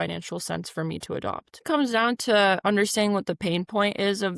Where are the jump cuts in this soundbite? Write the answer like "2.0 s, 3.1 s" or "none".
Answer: 1.6 s